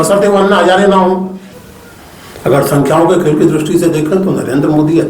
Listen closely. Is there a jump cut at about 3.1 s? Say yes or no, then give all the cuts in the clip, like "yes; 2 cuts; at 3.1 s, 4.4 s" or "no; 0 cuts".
no; 1 cut; at 1.4 s